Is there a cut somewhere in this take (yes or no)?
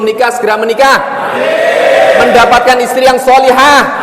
no